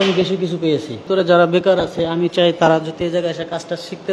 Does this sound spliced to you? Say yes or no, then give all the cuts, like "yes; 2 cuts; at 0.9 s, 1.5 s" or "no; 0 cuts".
yes; 1 cut; at 1.0 s